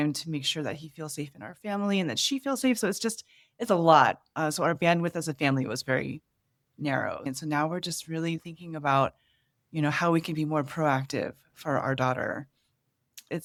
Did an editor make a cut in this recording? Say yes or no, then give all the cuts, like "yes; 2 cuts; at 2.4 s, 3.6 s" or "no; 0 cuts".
no; 0 cuts